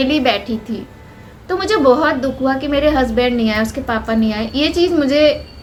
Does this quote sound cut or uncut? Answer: uncut